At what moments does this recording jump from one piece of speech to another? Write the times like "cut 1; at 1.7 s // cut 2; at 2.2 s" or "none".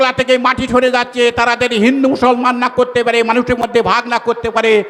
none